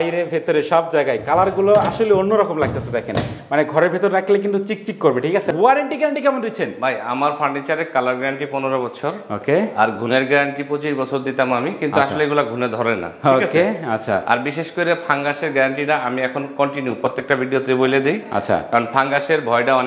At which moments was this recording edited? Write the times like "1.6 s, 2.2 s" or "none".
5.5 s